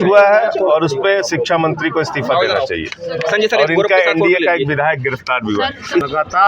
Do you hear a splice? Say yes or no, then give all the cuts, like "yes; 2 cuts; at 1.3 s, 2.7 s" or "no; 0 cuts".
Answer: no; 0 cuts